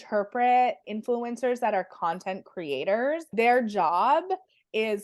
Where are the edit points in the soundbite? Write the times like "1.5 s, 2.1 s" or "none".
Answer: 0.9 s, 3.3 s